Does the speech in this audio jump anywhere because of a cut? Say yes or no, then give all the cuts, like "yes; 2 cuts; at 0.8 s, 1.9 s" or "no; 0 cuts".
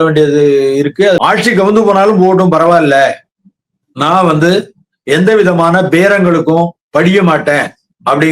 yes; 1 cut; at 1.2 s